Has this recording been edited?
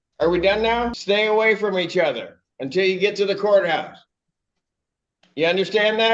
yes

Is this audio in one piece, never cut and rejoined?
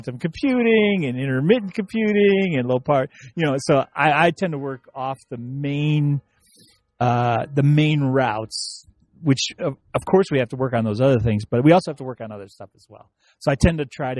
yes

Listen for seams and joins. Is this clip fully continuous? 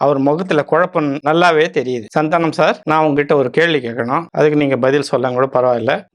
yes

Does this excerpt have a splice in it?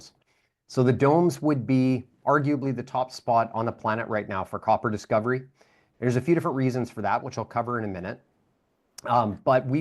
no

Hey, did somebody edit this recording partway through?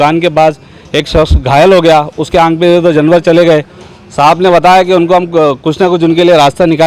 no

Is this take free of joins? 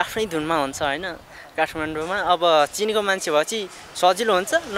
yes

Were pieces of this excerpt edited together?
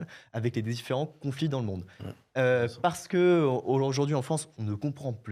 no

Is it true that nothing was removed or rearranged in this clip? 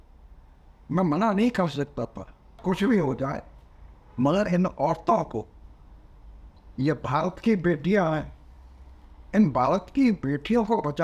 no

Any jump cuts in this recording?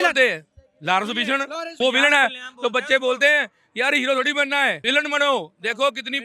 yes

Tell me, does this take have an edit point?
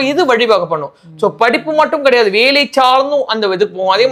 no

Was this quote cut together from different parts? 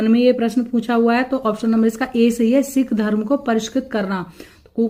no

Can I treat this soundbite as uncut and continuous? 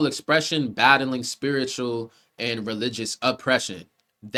yes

